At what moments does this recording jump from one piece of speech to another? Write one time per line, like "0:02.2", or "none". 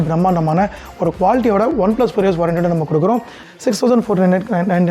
0:03.4